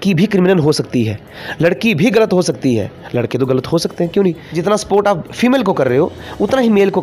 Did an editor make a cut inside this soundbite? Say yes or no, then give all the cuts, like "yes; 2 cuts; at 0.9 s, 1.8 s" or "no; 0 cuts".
yes; 1 cut; at 4.5 s